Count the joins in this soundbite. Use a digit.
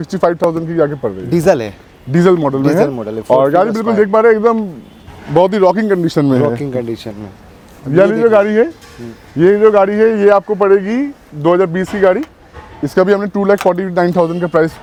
0